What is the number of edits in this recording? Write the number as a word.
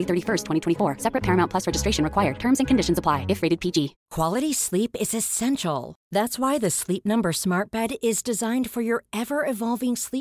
one